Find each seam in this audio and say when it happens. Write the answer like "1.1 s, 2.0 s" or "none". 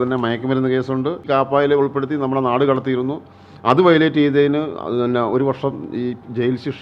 1.2 s